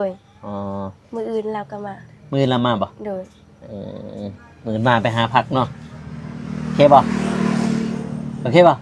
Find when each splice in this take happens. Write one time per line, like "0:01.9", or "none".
none